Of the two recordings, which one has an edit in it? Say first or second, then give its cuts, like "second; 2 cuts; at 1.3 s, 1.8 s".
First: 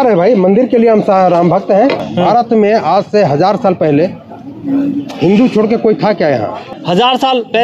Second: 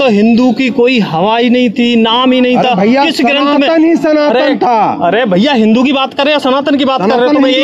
first; 2 cuts; at 2.0 s, 6.8 s